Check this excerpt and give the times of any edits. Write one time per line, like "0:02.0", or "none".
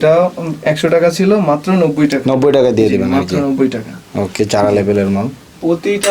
none